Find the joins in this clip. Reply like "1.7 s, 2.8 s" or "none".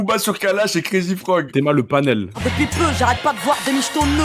1.5 s, 2.4 s